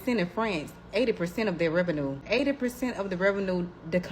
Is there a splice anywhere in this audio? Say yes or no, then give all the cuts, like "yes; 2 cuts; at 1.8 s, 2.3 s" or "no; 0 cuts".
yes; 1 cut; at 2.2 s